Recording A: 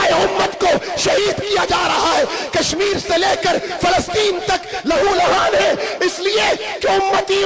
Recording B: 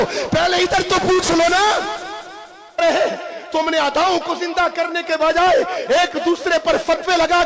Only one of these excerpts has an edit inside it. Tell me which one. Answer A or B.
B